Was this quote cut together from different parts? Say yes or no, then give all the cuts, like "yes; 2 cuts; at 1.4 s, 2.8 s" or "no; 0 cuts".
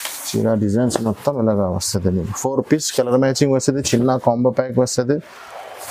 no; 0 cuts